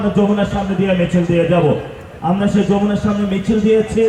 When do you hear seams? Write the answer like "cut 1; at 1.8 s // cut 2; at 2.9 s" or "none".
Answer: none